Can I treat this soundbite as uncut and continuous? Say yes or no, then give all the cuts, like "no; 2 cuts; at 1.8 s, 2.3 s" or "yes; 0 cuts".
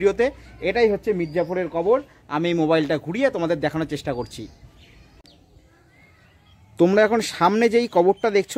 yes; 0 cuts